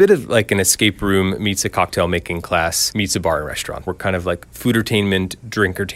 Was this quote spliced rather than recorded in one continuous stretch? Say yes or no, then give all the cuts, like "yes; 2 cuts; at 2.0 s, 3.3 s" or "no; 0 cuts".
yes; 2 cuts; at 2.8 s, 3.9 s